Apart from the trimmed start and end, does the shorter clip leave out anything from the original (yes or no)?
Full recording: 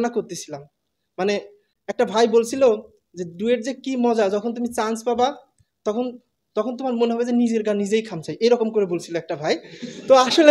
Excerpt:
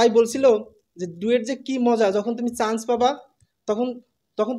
no